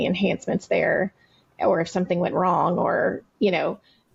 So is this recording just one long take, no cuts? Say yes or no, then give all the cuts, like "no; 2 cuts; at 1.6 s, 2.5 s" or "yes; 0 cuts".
yes; 0 cuts